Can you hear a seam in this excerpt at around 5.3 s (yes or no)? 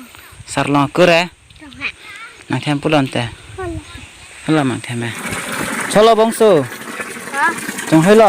yes